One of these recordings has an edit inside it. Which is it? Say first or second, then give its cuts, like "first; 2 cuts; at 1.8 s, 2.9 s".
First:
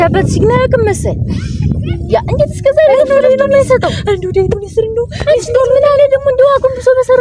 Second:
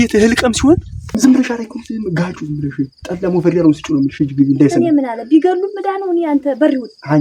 second; 1 cut; at 1.2 s